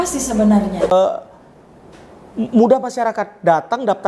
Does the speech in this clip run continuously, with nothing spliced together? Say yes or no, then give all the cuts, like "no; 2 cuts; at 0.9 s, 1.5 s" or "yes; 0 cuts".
no; 1 cut; at 0.9 s